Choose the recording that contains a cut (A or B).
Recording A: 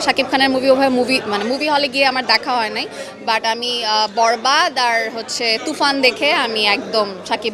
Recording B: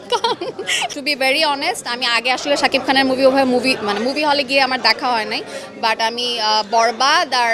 B